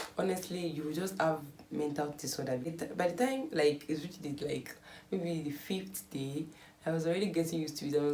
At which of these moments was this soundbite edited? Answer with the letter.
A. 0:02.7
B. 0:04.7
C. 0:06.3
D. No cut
A